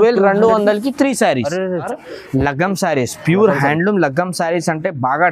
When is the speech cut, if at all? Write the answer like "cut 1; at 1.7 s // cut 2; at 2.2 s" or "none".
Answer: cut 1; at 1.8 s